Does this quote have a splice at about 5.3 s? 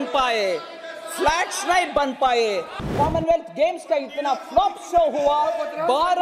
no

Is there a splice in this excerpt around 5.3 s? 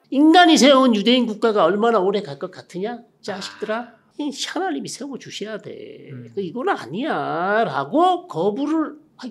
no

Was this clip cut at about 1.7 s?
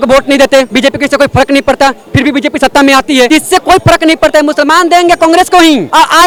no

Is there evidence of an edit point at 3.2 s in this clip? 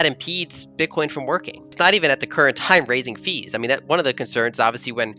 no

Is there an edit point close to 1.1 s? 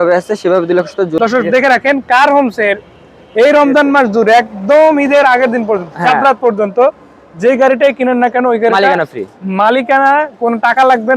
yes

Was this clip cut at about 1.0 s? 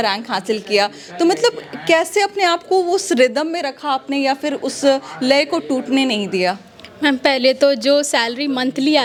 no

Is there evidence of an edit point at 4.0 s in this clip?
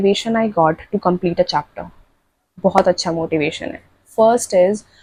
no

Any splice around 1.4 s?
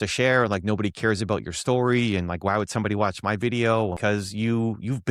no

